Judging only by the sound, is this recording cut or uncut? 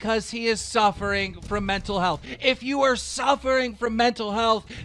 uncut